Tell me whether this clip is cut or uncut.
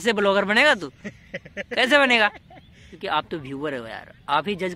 cut